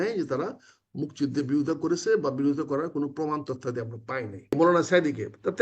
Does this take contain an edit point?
yes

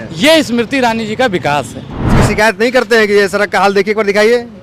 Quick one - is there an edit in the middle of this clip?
yes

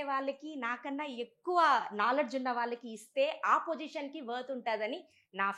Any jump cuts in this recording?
no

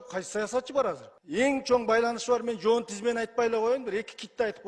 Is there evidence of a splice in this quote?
yes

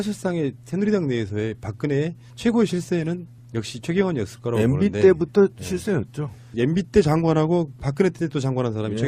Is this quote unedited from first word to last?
yes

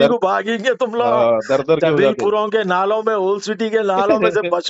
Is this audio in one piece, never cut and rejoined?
yes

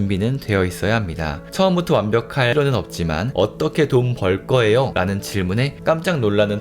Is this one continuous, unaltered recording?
no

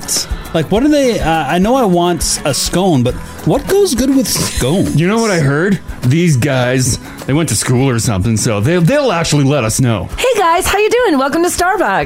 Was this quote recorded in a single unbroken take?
yes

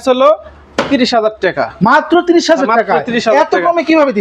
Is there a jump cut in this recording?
no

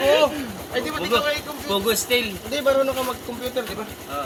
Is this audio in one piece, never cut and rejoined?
yes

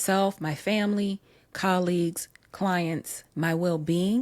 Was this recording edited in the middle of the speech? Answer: yes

